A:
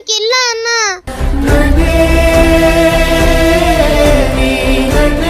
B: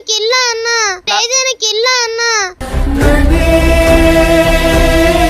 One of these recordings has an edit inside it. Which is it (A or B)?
A